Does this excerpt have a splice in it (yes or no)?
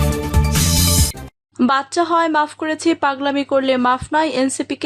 no